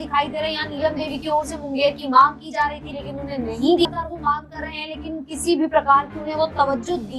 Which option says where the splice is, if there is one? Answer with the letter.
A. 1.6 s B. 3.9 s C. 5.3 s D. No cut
B